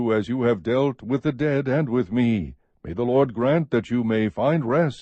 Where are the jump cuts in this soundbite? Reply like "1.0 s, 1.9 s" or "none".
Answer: 1.2 s